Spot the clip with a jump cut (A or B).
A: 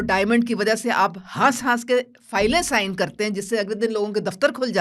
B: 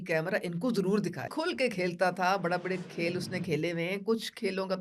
B